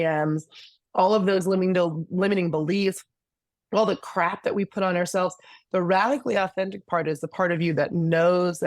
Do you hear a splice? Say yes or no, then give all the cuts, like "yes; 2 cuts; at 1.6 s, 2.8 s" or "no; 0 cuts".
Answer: no; 0 cuts